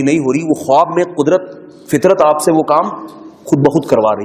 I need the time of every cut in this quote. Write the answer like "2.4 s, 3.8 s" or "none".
none